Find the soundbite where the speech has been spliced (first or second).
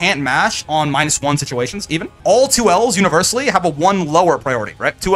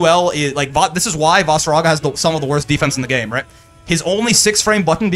first